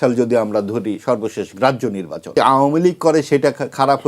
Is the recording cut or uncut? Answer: cut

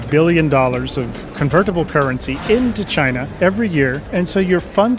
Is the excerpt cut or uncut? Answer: cut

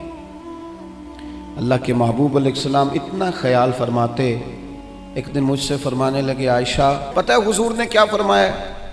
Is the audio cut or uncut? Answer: cut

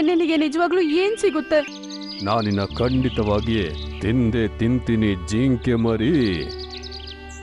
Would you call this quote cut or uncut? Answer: cut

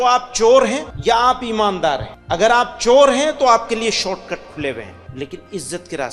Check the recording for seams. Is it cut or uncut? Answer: cut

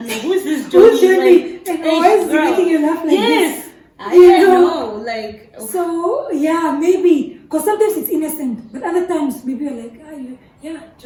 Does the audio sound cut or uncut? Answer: uncut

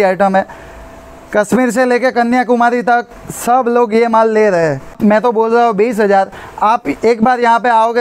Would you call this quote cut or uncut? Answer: cut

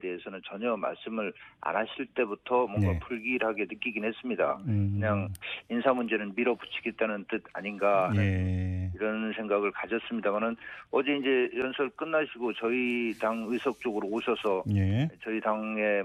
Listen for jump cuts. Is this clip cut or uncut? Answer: uncut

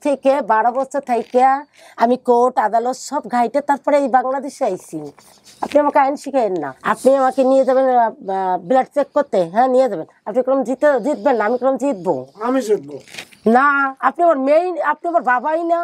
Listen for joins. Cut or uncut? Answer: cut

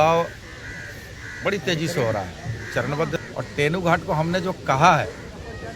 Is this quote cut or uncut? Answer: cut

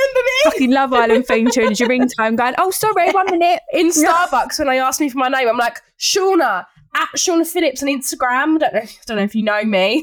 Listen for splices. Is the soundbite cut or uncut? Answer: uncut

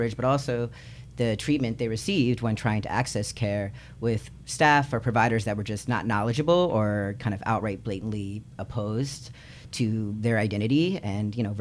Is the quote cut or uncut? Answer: cut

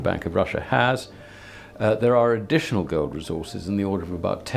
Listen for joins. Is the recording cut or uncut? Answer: uncut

